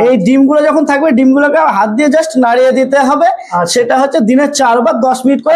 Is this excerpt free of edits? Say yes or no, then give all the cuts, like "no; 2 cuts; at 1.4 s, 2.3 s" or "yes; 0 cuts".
yes; 0 cuts